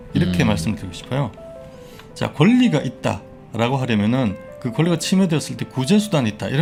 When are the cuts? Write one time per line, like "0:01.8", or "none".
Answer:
none